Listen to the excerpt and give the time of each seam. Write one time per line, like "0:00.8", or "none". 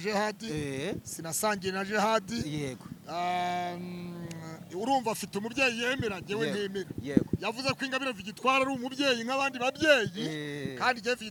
none